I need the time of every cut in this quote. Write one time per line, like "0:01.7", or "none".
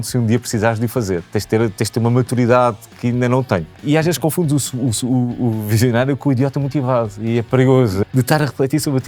0:03.8
0:08.0

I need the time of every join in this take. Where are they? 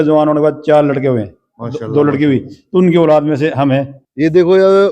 0:04.0

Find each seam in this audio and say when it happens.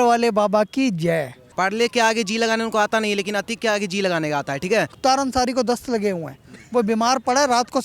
0:01.4
0:04.9

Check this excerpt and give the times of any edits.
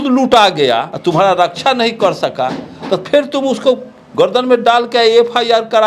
0:00.9

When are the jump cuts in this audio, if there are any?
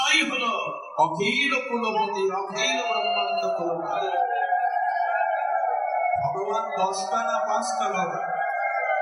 none

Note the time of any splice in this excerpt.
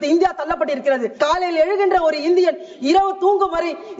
0:01.1

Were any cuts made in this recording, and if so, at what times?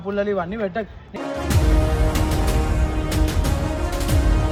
none

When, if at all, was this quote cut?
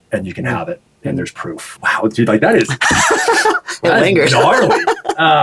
0:01.7

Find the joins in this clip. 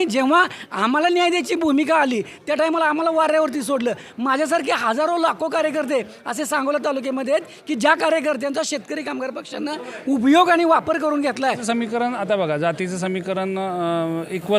0:11.6

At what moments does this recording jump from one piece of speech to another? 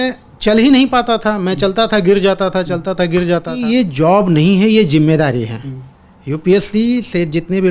0:03.5

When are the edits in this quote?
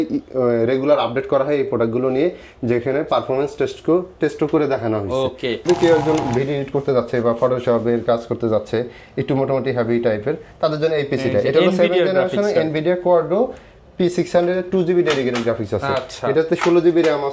0:05.6

